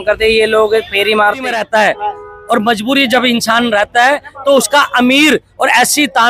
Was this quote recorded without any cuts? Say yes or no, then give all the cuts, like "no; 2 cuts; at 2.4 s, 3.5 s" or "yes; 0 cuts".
no; 1 cut; at 1.6 s